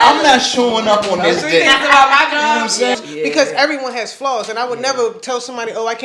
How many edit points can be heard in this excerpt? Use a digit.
1